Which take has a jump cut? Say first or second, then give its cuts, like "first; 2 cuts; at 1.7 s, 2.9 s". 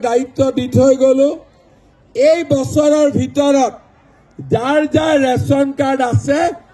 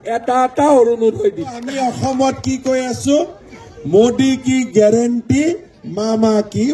second; 1 cut; at 1.7 s